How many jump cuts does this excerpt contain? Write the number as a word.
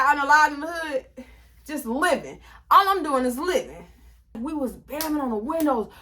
one